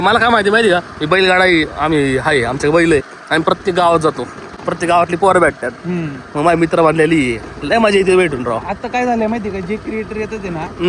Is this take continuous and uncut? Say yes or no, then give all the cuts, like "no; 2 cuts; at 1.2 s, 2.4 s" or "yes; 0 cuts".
yes; 0 cuts